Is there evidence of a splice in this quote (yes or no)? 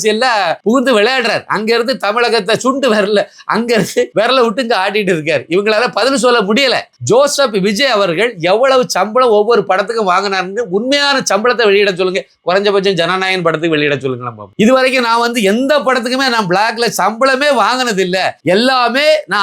yes